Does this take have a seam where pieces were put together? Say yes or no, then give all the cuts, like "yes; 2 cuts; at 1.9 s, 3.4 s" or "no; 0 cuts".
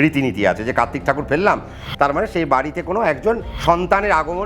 yes; 2 cuts; at 1.8 s, 3.5 s